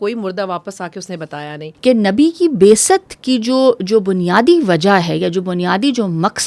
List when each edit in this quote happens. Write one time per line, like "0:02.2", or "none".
0:01.6